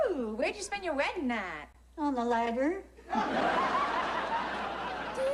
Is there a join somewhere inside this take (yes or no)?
no